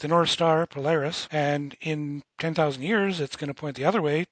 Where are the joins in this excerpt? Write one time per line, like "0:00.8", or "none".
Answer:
0:01.2